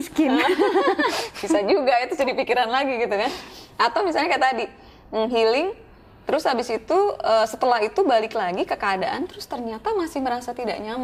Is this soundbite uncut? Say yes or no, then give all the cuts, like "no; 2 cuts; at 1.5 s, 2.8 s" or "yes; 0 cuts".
yes; 0 cuts